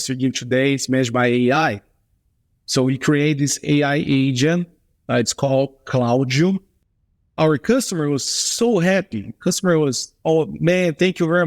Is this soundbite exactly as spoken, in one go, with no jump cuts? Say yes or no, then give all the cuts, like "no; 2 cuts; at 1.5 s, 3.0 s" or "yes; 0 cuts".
no; 1 cut; at 7.3 s